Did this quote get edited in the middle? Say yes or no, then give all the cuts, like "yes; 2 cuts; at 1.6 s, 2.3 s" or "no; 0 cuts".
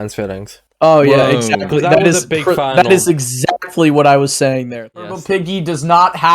yes; 1 cut; at 4.9 s